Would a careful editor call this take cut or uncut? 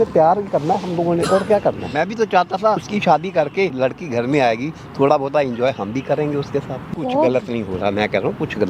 cut